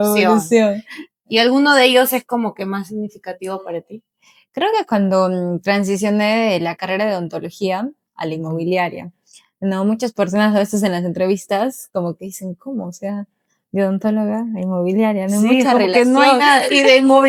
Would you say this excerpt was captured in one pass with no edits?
yes; 0 cuts

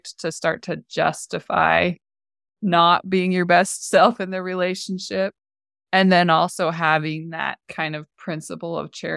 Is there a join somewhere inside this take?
no; 0 cuts

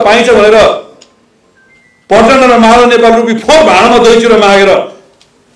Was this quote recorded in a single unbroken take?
yes; 0 cuts

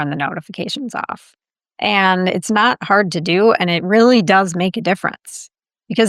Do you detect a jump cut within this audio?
no; 0 cuts

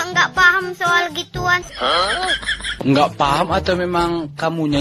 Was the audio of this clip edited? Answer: no; 0 cuts

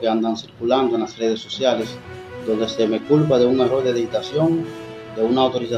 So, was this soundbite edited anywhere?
no; 0 cuts

